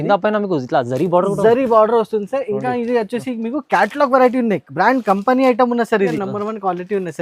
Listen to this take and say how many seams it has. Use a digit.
1